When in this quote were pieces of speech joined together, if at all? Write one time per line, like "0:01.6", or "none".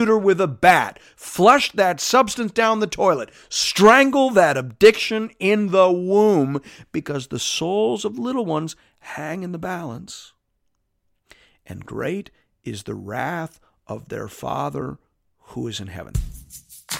0:16.1